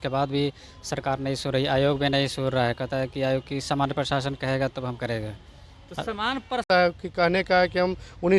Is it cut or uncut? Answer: cut